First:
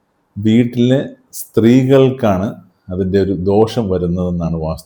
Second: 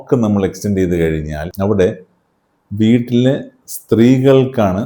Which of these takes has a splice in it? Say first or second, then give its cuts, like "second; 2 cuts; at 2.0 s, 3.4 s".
second; 1 cut; at 1.4 s